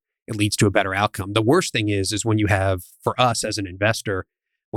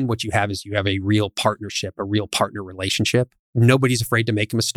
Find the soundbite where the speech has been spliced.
second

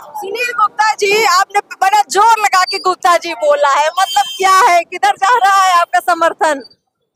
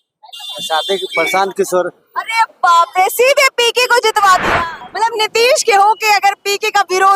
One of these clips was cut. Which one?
second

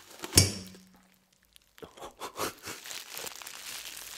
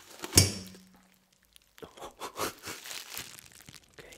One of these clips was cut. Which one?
second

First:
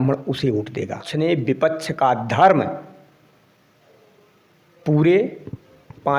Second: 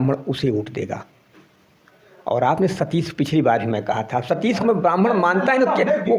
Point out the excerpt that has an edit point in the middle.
first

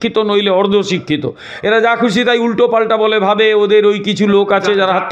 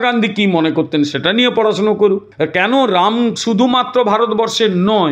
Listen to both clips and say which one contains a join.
second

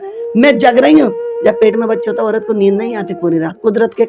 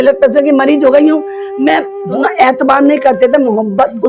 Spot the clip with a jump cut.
second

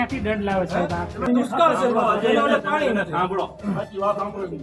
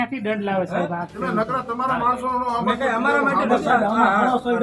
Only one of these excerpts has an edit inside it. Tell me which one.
second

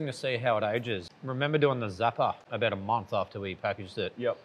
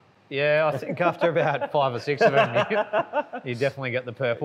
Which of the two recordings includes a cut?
first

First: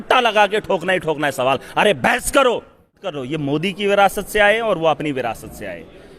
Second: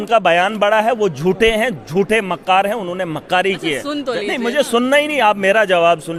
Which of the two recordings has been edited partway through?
first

